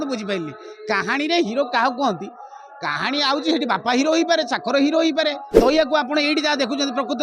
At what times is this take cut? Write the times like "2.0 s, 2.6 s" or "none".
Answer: 5.6 s